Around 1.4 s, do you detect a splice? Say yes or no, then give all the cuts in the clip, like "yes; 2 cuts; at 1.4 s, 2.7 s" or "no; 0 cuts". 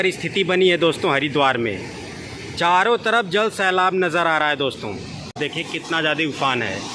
no; 1 cut; at 5.3 s